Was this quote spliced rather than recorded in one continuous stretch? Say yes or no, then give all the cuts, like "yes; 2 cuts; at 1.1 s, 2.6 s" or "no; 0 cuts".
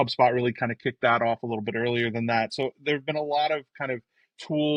no; 0 cuts